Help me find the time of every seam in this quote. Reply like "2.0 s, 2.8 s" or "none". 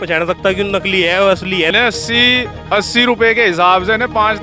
1.7 s